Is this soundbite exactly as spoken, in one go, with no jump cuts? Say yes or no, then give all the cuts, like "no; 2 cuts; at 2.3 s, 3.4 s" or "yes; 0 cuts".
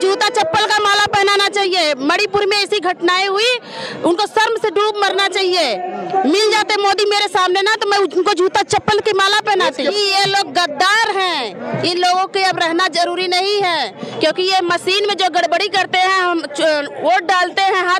yes; 0 cuts